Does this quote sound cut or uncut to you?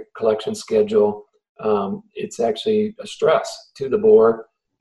uncut